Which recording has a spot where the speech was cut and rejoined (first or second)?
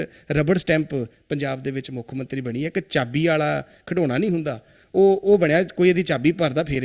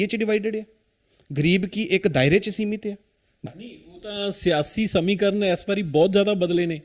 second